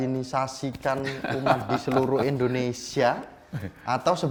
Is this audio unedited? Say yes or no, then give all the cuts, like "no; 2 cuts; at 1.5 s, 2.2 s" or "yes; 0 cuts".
yes; 0 cuts